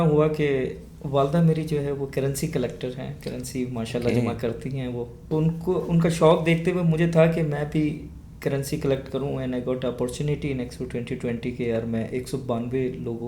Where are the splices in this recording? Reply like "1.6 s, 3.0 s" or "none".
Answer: 5.2 s